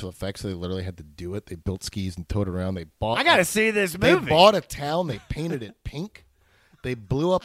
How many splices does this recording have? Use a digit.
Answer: 0